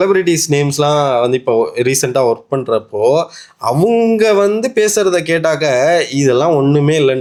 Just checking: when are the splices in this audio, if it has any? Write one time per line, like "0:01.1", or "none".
none

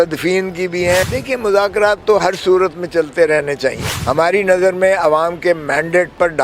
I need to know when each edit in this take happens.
0:01.1
0:03.9

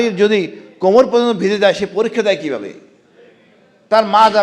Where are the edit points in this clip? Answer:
none

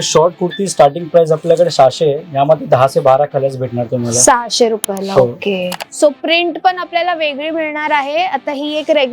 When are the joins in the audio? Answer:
0:05.7

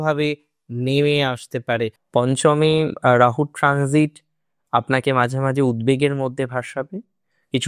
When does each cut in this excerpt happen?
0:02.0

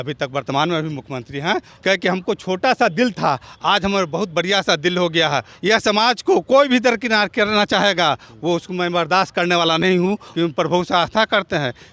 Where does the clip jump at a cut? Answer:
0:01.7
0:05.5
0:10.3

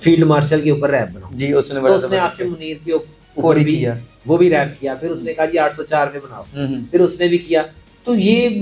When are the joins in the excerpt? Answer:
none

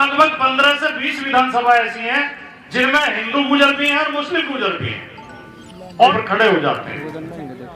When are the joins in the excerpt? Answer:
0:06.1

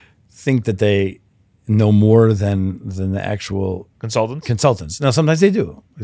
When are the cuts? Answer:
0:03.9

